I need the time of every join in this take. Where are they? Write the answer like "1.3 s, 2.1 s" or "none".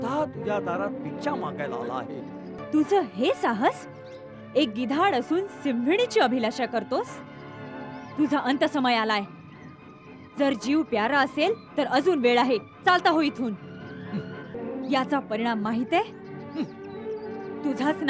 2.6 s, 14.5 s